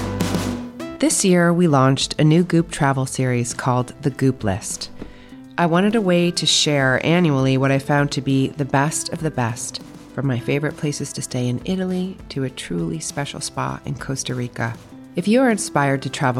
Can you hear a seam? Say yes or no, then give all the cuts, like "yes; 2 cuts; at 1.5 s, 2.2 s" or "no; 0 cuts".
yes; 1 cut; at 0.9 s